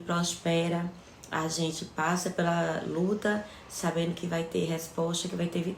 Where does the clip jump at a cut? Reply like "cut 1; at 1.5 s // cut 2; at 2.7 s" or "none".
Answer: none

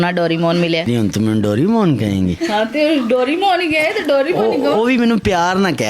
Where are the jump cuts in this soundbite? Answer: none

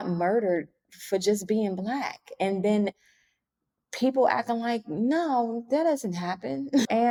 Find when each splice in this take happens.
none

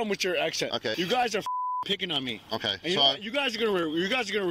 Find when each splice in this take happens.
cut 1; at 0.9 s

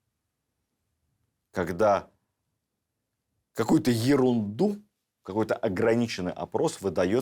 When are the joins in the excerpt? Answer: none

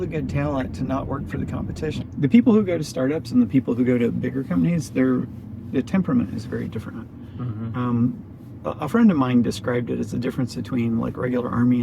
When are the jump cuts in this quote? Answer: cut 1; at 2.0 s

